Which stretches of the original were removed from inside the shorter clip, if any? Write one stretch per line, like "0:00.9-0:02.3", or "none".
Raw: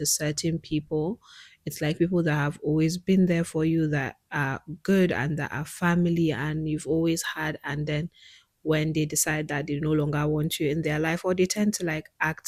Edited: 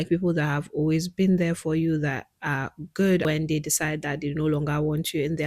0:05.1-0:08.7